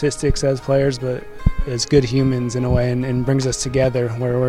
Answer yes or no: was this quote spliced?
yes